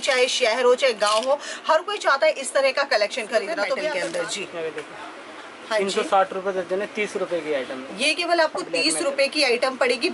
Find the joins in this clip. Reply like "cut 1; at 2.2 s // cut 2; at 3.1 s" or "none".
cut 1; at 3.9 s